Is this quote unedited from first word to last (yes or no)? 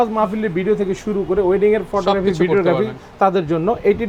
yes